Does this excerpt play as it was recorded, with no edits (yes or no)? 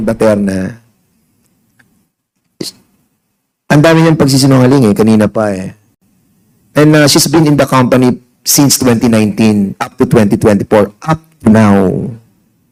yes